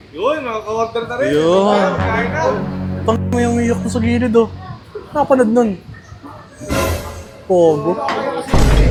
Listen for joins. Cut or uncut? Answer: uncut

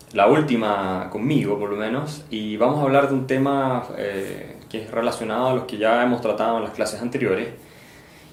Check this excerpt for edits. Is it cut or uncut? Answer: uncut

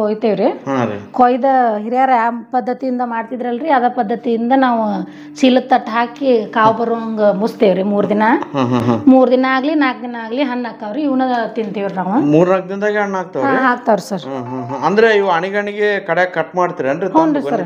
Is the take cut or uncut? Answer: uncut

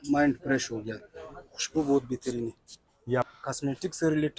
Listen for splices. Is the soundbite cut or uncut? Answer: cut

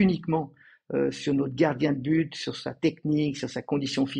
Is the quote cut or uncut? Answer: uncut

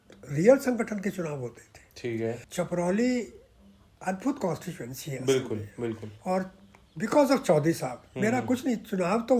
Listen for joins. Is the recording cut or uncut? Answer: cut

